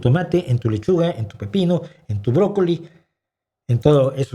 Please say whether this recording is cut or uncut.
uncut